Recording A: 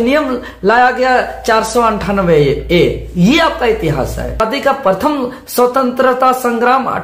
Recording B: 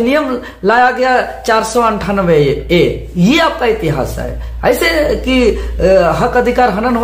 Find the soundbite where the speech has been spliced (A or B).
A